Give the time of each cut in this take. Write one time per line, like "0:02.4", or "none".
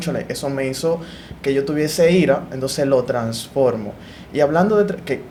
none